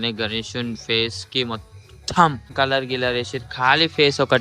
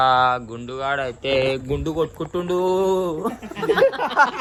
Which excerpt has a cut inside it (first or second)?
first